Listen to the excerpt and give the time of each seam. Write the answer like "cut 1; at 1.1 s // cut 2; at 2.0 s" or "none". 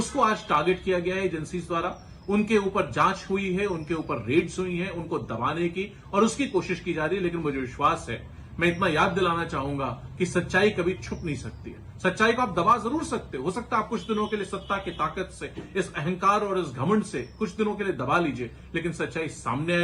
none